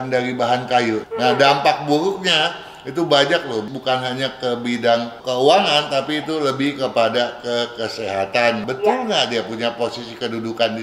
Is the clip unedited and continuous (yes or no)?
no